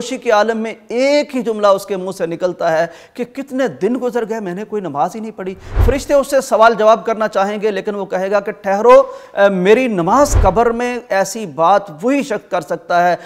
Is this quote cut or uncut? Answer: cut